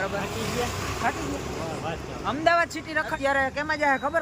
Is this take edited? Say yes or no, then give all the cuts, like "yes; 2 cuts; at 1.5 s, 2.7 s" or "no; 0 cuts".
yes; 1 cut; at 3.1 s